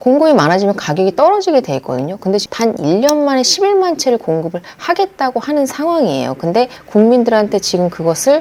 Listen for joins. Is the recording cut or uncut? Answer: cut